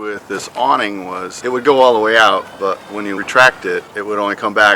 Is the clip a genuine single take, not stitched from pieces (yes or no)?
no